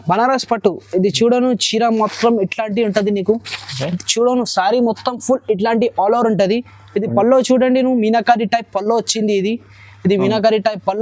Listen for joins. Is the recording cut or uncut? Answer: uncut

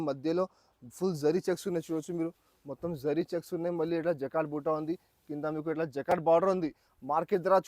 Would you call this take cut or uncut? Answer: uncut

